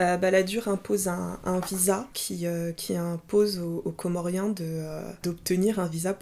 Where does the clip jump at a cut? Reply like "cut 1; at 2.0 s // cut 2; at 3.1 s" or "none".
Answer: cut 1; at 2.2 s // cut 2; at 5.2 s